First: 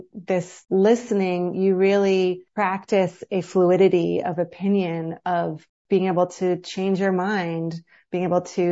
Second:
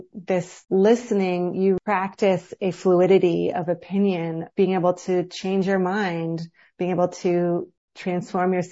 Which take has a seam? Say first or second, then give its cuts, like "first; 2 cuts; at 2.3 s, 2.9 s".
second; 2 cuts; at 1.8 s, 4.4 s